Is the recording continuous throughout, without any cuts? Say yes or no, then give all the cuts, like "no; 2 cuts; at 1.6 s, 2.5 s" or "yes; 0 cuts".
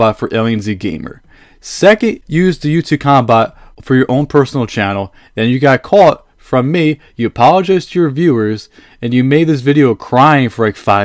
yes; 0 cuts